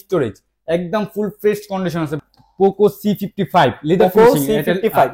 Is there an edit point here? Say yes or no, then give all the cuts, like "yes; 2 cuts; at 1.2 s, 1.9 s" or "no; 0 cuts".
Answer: yes; 1 cut; at 2.2 s